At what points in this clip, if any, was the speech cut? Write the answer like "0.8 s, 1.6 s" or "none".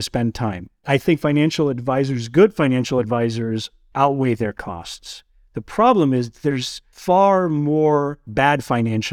none